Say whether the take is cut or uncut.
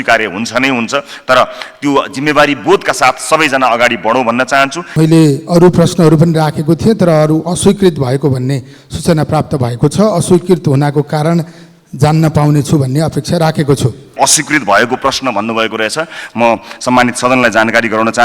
cut